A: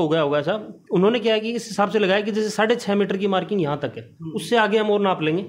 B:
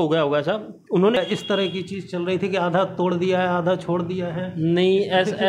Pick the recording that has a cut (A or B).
B